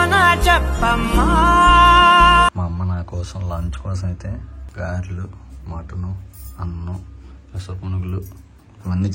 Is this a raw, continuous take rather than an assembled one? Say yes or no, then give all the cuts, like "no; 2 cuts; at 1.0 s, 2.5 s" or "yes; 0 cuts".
no; 2 cuts; at 2.6 s, 4.6 s